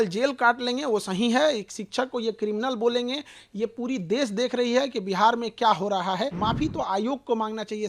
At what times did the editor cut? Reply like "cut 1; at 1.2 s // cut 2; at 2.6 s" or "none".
cut 1; at 6.3 s